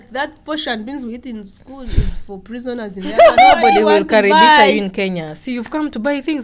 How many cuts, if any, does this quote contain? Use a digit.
1